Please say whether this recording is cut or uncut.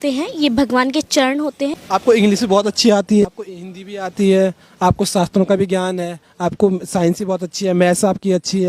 cut